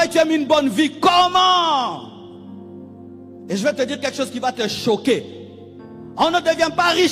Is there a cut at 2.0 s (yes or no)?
no